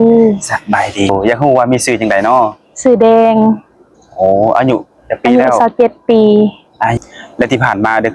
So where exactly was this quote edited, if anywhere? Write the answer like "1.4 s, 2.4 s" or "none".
1.1 s, 7.0 s